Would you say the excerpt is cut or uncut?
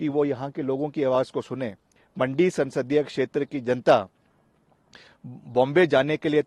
cut